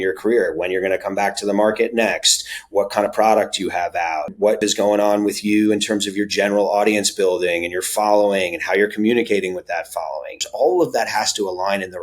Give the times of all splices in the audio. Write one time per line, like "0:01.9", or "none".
0:04.6
0:10.4